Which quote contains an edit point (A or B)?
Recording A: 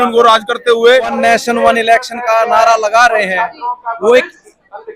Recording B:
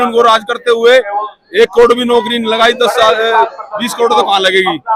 A